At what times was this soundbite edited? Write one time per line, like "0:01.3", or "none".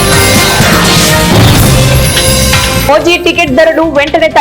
0:02.8